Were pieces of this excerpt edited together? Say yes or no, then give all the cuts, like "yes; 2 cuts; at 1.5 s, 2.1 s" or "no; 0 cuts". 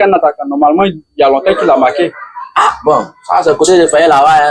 no; 0 cuts